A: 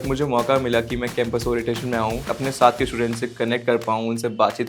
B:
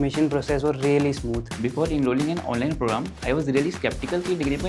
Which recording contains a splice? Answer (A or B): B